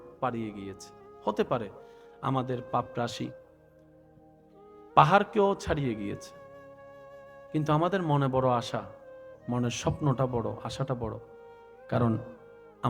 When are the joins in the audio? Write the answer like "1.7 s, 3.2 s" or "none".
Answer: none